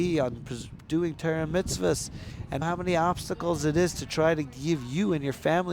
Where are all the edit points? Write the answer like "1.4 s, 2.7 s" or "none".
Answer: 2.6 s

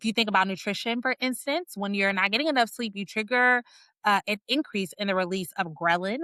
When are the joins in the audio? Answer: none

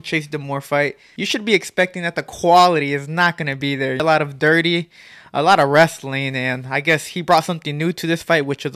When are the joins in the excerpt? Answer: 1.1 s, 4.0 s

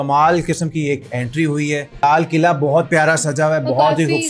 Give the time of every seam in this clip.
2.0 s

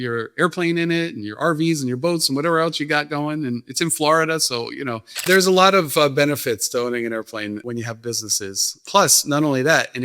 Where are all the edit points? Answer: 5.2 s, 7.6 s, 8.8 s

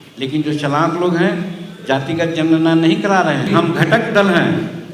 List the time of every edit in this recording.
3.5 s

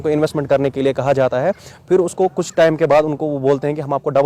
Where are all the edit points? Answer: none

